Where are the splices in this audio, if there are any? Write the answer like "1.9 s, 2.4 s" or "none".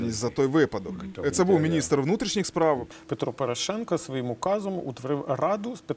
1.0 s, 3.0 s